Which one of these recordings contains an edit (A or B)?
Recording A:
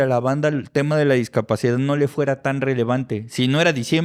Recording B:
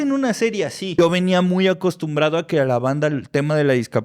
B